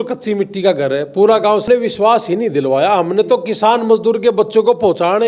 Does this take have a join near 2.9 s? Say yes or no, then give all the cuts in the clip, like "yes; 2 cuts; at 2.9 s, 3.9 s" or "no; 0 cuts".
no; 1 cut; at 1.6 s